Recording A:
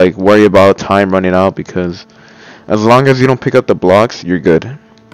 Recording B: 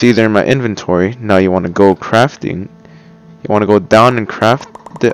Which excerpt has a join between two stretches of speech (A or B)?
B